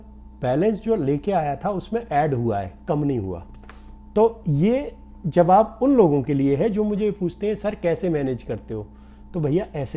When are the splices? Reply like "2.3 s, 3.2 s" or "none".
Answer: none

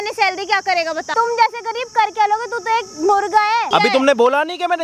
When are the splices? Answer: 1.1 s, 3.7 s

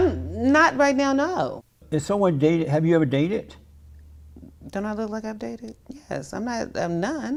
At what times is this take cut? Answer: none

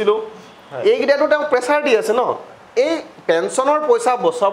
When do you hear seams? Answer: 2.6 s

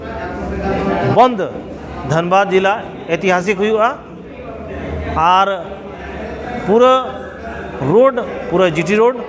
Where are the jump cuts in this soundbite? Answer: none

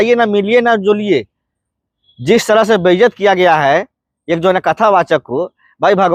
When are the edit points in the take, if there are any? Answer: none

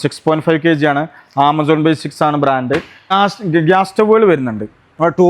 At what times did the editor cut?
3.0 s

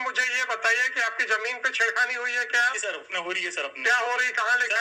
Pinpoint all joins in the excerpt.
none

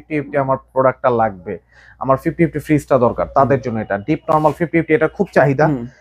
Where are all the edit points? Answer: none

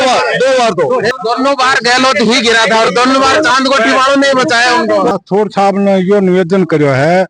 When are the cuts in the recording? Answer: 1.1 s, 5.2 s

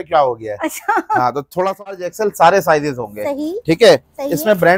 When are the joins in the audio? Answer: 2.0 s

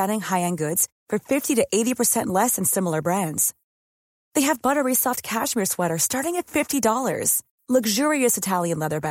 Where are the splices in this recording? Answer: none

